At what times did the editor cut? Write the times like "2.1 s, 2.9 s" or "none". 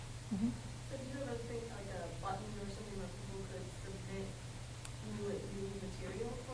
0.9 s